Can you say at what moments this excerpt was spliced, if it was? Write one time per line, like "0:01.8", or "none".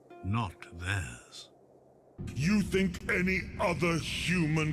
0:02.2